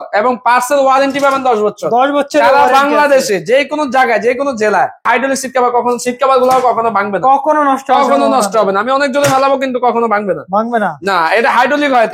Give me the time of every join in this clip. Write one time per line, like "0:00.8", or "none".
0:05.1